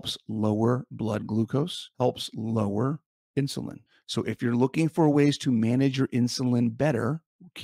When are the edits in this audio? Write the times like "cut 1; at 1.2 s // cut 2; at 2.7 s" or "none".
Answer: cut 1; at 1.8 s